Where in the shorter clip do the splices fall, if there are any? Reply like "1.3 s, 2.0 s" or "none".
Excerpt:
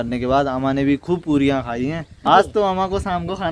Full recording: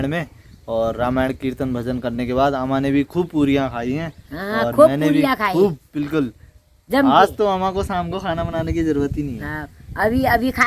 2.3 s

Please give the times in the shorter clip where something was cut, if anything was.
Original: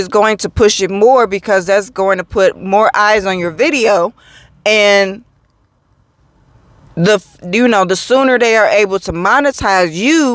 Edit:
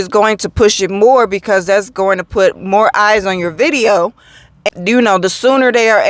4.6 s

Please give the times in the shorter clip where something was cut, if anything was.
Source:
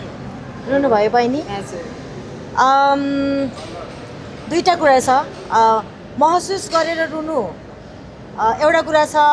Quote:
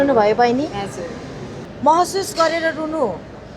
1.6 s

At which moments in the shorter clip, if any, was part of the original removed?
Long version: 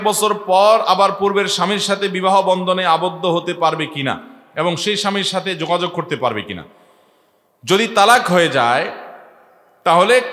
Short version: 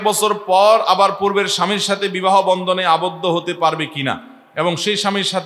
none

